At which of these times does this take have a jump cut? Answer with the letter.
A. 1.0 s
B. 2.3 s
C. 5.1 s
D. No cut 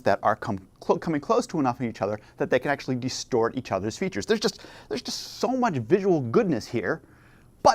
C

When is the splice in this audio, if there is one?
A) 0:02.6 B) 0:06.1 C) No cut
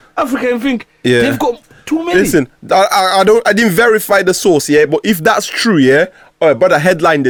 C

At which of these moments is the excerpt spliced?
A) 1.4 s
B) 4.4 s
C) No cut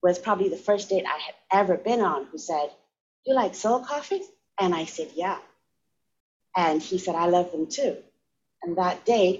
B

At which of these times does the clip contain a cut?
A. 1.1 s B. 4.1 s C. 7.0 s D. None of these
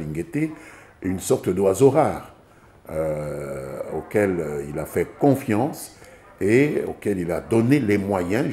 D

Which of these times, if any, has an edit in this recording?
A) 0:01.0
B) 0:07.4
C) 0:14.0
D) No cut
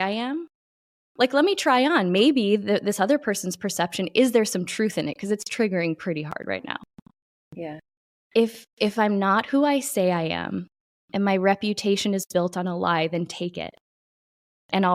D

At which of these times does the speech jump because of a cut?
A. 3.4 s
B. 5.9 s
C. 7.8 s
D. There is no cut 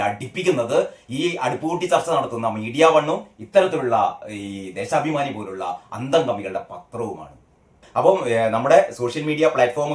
C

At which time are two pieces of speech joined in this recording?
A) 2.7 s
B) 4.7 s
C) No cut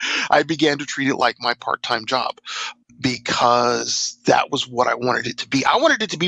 A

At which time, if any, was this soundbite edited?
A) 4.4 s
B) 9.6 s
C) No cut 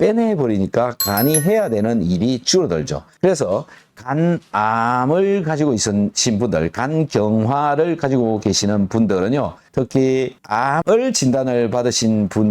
B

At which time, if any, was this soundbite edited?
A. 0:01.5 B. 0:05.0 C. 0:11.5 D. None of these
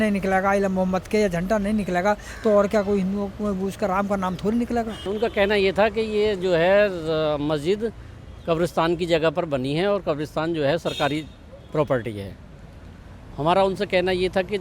B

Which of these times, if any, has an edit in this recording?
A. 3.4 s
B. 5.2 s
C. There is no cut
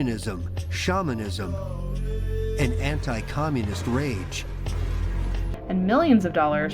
B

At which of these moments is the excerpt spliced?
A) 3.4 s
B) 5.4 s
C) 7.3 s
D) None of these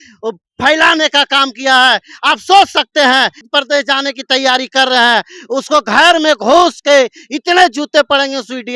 A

